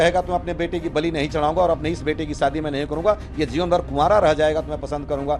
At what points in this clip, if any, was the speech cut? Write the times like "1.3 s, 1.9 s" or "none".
none